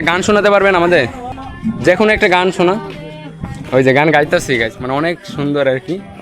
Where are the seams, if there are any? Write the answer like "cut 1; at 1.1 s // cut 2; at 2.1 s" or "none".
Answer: cut 1; at 1.5 s